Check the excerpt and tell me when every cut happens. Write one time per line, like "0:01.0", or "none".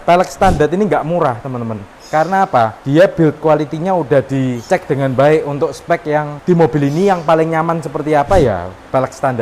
0:04.6